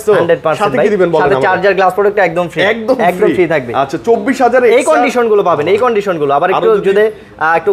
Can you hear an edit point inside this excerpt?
no; 0 cuts

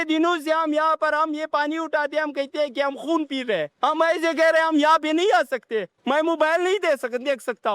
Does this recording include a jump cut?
yes; 2 cuts; at 3.7 s, 5.9 s

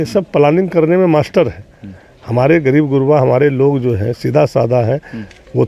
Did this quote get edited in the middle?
no; 0 cuts

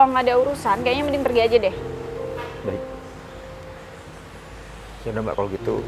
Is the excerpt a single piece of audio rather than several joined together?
yes; 0 cuts

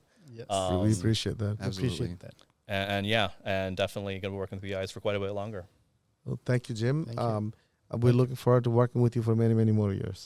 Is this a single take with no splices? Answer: yes; 0 cuts

